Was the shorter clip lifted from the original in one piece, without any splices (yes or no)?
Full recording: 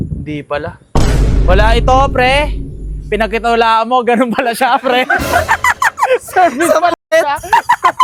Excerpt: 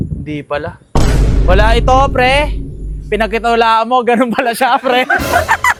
yes